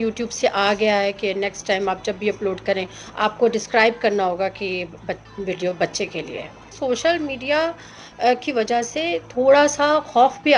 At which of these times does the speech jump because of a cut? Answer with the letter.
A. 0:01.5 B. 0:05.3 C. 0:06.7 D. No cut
C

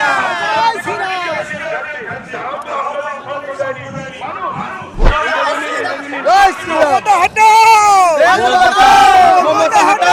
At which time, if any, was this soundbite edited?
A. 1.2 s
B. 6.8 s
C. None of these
C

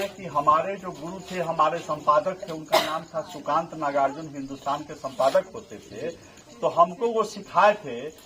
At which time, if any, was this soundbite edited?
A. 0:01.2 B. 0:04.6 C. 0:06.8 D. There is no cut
D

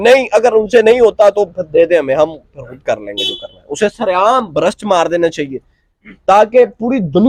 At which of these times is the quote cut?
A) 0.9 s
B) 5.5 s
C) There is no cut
C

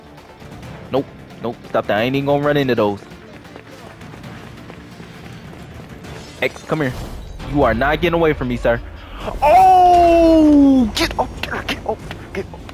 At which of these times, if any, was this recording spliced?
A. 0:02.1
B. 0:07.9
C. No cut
C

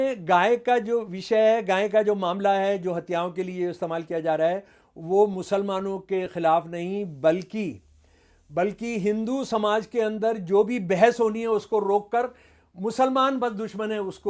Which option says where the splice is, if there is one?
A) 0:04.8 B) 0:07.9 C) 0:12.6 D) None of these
D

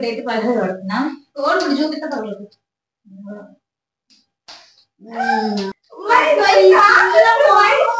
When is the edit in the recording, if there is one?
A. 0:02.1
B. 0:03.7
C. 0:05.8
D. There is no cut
C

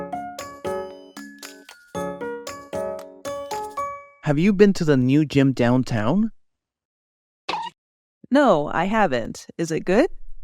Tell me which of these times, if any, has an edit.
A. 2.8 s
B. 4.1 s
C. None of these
B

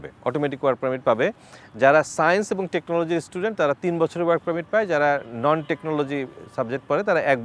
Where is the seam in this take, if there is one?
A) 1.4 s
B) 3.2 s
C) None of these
C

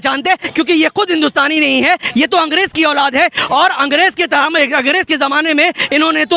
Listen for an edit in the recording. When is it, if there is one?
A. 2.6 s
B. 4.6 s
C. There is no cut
C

